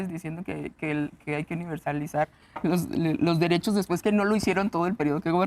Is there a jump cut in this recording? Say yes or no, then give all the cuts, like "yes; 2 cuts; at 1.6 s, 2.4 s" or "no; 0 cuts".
no; 0 cuts